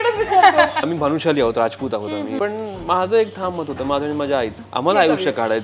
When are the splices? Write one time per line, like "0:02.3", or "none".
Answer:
0:00.9
0:02.4
0:04.6